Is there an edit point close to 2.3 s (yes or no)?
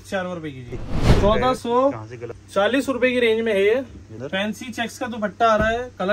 no